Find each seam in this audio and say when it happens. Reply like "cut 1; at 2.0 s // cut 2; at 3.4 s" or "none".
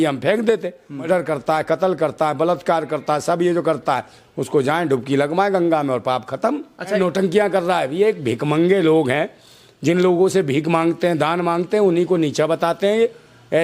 cut 1; at 1.0 s // cut 2; at 7.0 s